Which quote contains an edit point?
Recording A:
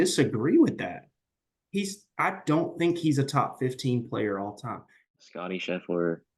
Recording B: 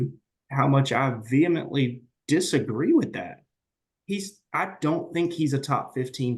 A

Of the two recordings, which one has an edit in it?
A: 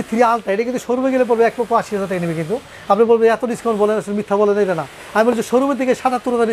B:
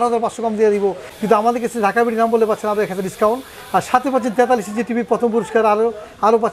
B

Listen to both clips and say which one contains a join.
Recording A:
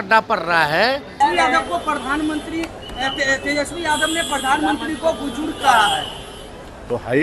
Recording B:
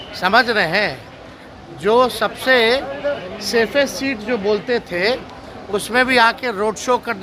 A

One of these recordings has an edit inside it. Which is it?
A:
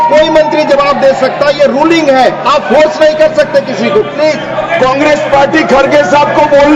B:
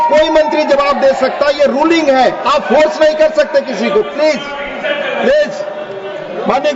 A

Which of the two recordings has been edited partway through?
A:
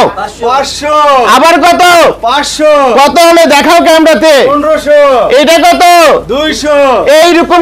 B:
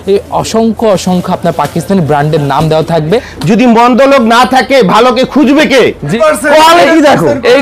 B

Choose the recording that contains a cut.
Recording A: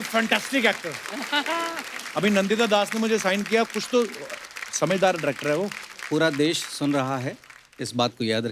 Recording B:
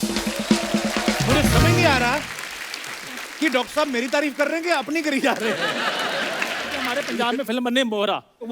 B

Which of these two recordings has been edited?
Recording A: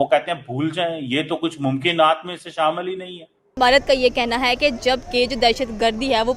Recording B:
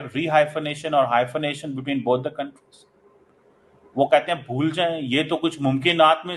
A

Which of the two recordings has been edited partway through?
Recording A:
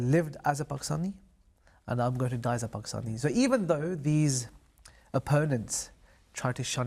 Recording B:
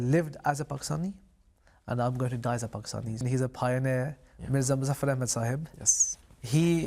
B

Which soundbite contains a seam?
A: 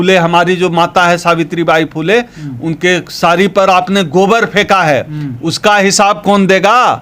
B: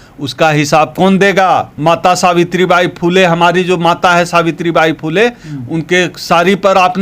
B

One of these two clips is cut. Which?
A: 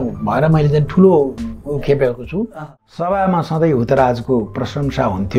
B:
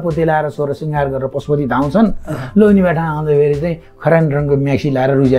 A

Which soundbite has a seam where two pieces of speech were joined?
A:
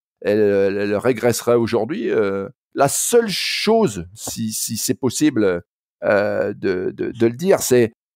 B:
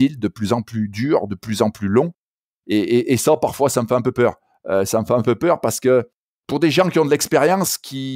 A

